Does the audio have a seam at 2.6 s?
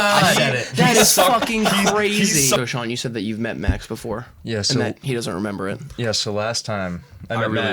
yes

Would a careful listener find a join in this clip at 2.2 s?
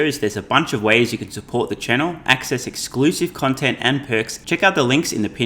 no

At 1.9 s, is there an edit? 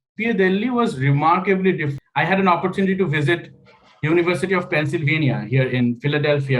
yes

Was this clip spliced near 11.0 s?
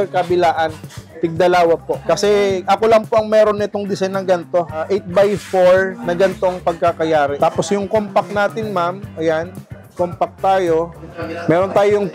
no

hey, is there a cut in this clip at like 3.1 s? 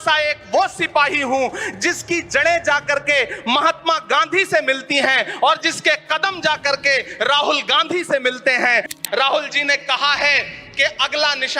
no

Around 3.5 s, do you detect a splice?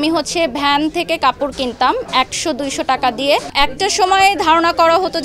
yes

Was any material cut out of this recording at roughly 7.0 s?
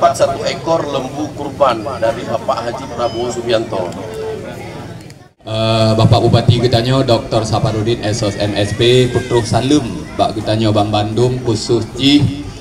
no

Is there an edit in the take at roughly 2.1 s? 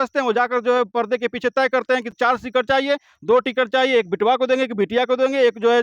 no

